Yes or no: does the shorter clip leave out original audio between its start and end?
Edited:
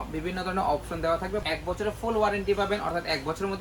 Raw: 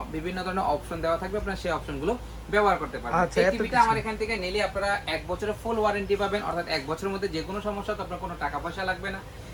yes